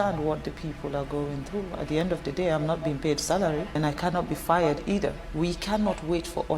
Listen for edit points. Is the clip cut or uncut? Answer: cut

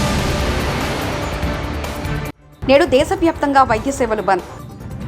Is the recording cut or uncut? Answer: cut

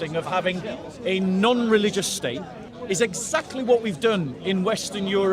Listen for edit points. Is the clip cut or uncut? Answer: cut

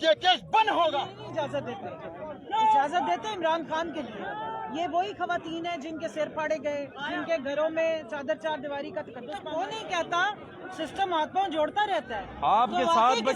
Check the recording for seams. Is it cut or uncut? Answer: cut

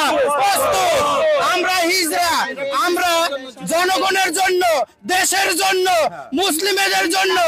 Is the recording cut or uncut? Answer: uncut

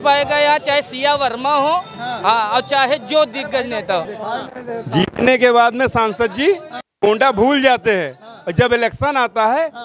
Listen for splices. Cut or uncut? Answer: cut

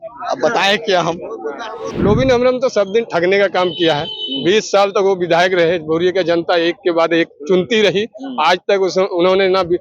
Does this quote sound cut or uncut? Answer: cut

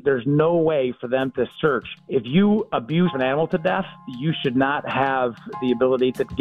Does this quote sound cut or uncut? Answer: cut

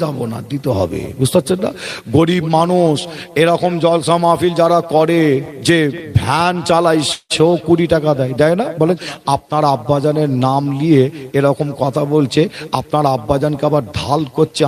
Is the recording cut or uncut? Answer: cut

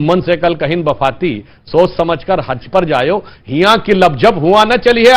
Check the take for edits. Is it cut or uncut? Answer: uncut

